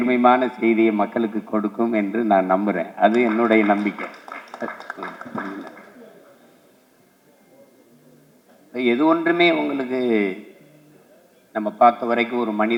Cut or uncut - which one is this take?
uncut